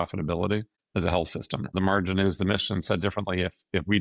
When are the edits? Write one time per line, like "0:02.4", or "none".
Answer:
0:01.7